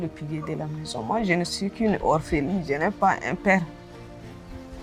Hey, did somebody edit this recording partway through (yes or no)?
no